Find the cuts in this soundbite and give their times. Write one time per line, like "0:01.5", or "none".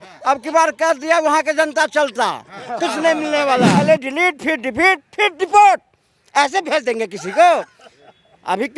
0:03.8